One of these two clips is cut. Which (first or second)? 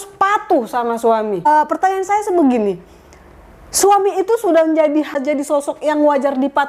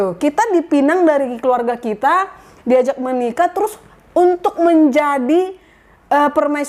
first